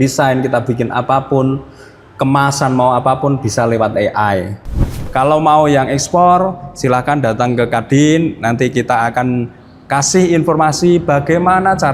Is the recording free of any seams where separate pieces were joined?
no; 1 cut; at 5.0 s

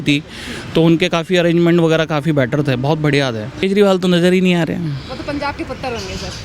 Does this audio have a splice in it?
yes; 1 cut; at 3.6 s

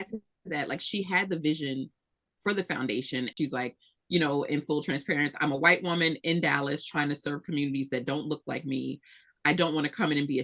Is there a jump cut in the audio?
yes; 1 cut; at 3.3 s

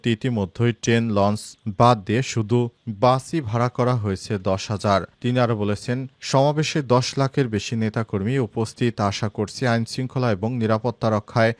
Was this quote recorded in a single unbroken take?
yes; 0 cuts

